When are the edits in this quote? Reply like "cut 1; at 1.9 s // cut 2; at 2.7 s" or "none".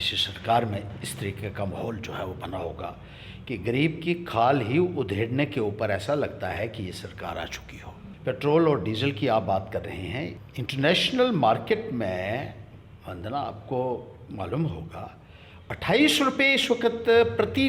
cut 1; at 8.1 s // cut 2; at 10.4 s